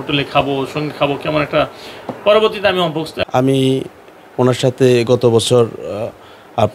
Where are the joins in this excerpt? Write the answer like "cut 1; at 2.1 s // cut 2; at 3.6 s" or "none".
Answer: cut 1; at 3.1 s

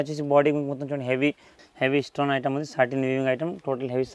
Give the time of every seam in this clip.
cut 1; at 1.5 s

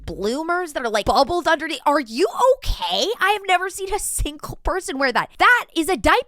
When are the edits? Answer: cut 1; at 5.3 s

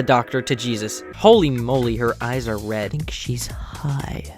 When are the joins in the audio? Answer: cut 1; at 1.1 s

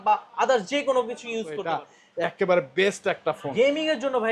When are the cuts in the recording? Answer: cut 1; at 1.6 s

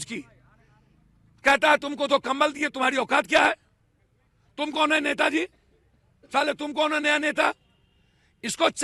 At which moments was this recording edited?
none

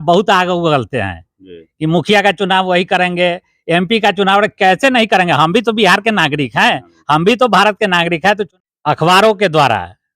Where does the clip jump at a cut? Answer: cut 1; at 8.5 s

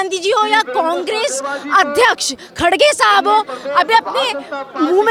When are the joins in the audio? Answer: none

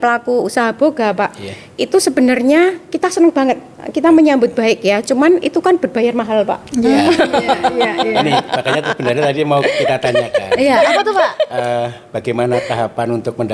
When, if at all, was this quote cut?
none

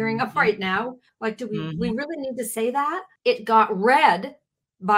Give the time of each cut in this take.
cut 1; at 1.1 s // cut 2; at 3.1 s

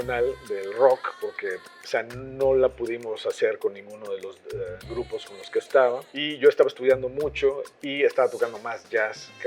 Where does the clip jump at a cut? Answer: cut 1; at 6.3 s

